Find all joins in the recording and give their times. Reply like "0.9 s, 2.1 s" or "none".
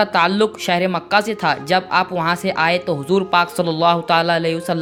none